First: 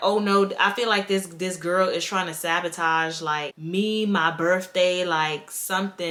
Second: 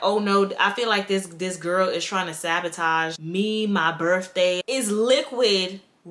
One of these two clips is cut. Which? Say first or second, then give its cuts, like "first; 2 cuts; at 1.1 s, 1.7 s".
second; 2 cuts; at 3.2 s, 4.6 s